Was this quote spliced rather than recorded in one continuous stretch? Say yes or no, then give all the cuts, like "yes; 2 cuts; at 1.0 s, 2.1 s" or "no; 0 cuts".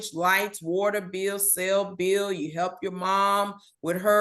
no; 0 cuts